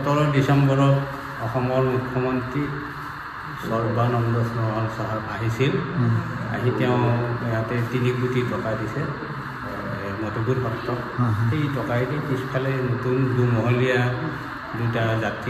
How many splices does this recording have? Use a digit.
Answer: 0